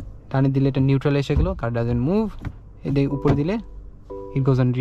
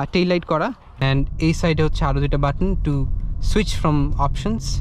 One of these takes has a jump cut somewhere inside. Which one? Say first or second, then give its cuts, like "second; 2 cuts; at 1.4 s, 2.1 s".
second; 1 cut; at 1.0 s